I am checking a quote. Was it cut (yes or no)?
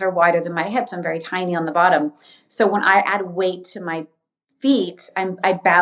no